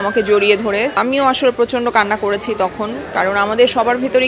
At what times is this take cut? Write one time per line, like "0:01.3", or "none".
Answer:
0:01.0